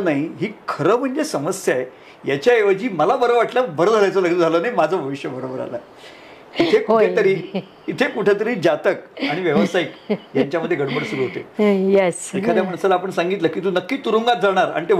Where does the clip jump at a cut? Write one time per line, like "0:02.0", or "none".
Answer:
none